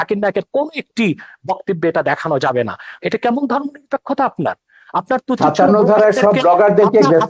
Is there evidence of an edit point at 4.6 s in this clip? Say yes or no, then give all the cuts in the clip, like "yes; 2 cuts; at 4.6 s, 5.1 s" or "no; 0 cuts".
no; 1 cut; at 2.9 s